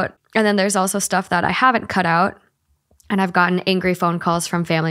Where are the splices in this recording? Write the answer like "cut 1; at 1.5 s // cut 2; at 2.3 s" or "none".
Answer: none